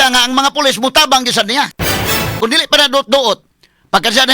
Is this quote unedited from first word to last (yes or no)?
no